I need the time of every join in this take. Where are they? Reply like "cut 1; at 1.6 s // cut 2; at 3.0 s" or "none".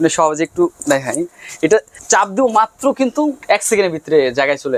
cut 1; at 1.9 s // cut 2; at 3.4 s